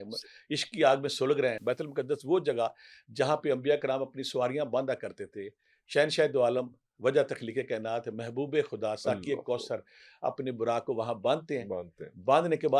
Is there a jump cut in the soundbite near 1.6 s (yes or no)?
yes